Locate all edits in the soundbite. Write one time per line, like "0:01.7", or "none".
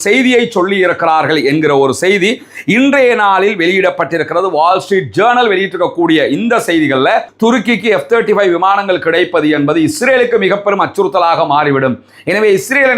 0:07.3